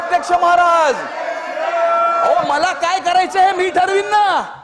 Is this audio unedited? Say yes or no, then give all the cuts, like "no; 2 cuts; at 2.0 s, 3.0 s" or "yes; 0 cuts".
no; 1 cut; at 2.3 s